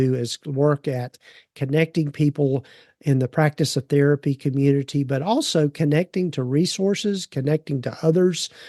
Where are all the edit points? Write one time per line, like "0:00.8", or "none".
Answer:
none